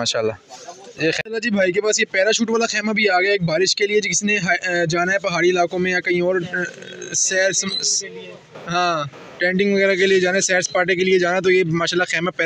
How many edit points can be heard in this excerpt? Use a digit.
1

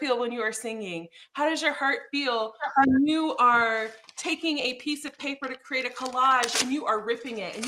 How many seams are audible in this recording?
0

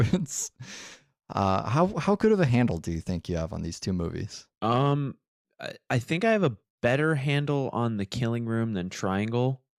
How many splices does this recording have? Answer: 0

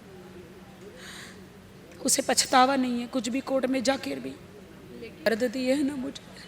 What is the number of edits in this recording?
1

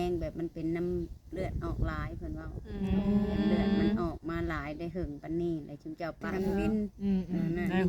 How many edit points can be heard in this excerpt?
1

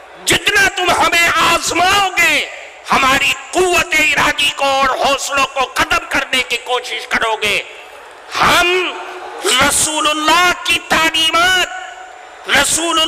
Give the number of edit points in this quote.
0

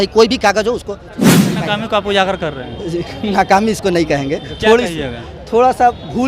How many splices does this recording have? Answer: 1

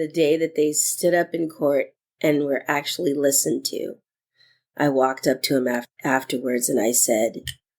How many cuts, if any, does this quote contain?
1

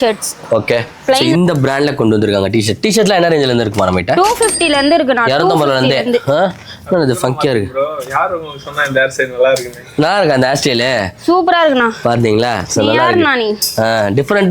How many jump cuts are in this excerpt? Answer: 1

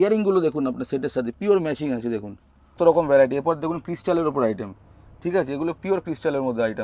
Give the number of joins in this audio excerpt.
1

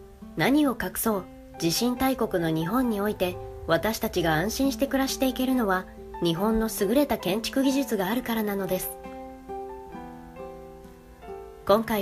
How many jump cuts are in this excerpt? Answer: 1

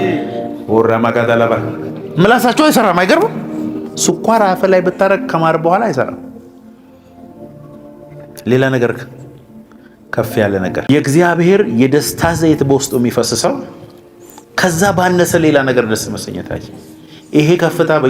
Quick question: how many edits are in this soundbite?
1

